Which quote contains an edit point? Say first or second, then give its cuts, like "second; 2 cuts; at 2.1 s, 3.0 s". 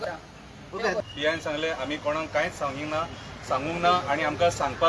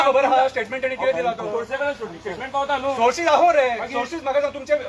first; 1 cut; at 1.0 s